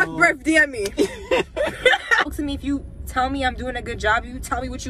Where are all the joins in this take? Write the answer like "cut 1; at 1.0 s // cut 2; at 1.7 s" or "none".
cut 1; at 2.3 s